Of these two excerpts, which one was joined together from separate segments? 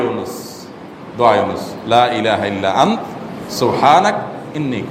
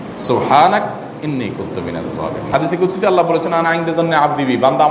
second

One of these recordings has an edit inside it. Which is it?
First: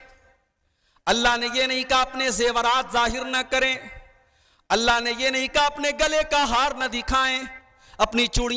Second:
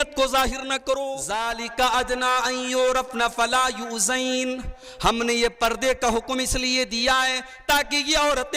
second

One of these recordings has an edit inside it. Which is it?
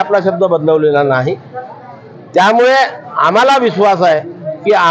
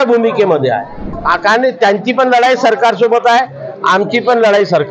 second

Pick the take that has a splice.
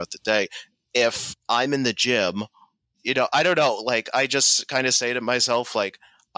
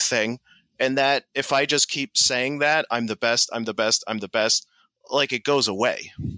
first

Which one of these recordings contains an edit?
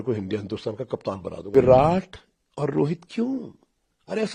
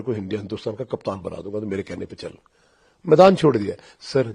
first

